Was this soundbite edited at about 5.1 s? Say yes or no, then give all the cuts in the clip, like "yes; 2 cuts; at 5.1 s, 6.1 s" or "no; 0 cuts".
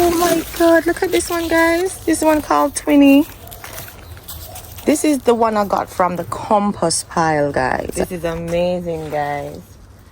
no; 1 cut; at 7.9 s